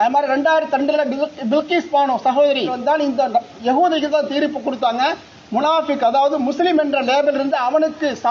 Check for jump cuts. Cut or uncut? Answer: cut